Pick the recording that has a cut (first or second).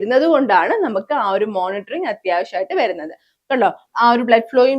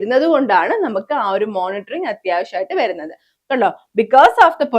first